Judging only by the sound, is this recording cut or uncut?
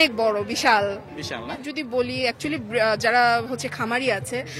cut